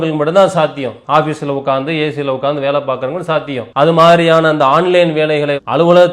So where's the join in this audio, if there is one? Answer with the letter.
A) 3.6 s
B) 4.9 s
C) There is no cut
A